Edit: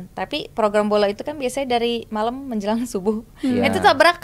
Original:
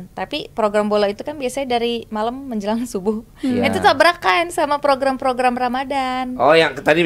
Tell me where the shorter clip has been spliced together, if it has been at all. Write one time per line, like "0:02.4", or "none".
none